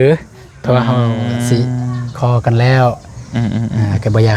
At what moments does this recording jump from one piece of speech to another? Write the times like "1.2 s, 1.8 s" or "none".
none